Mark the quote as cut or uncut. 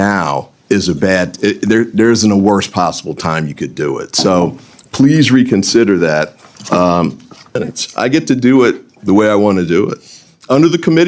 cut